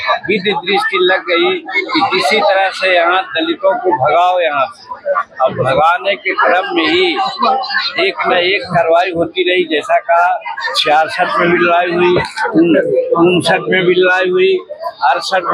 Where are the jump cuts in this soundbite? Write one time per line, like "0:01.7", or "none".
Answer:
none